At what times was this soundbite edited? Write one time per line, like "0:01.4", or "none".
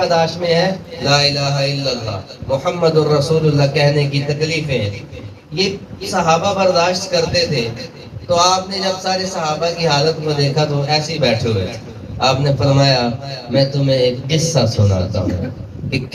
none